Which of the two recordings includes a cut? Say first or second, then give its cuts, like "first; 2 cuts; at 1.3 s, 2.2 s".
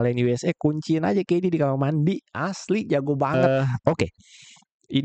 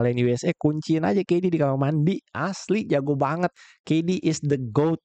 first; 1 cut; at 3.6 s